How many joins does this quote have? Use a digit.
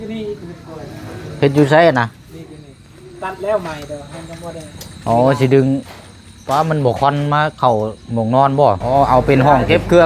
1